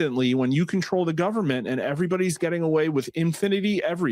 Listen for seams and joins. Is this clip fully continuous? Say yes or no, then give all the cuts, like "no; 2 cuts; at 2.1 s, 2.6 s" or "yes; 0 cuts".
yes; 0 cuts